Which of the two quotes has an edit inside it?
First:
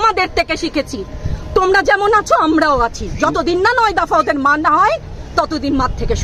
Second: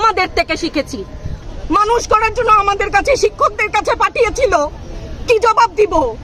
second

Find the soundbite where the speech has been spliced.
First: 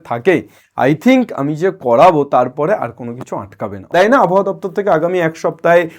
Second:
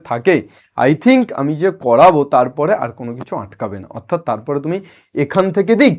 first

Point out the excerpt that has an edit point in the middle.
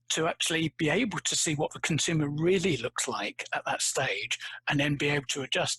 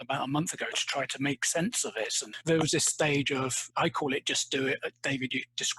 second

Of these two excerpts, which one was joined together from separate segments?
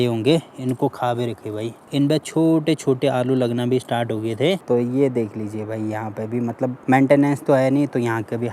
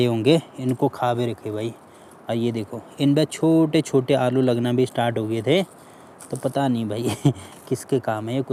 first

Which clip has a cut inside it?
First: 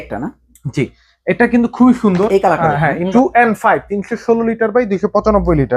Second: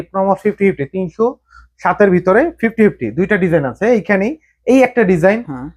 first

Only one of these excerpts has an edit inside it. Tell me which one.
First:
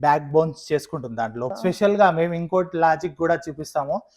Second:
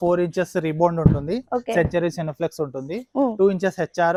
first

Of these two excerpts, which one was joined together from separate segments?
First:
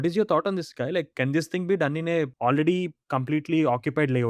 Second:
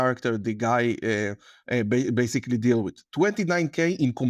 first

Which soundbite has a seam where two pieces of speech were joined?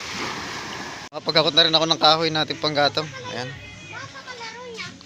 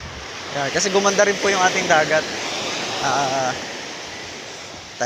first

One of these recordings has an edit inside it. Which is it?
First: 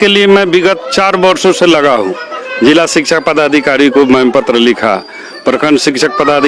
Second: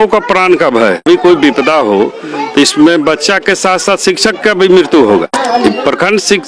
second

